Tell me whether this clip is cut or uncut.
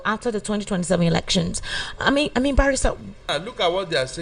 cut